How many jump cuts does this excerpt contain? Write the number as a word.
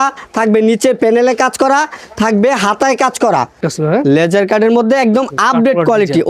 one